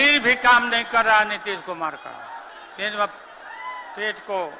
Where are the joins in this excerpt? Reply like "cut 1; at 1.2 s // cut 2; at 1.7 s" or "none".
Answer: cut 1; at 2.5 s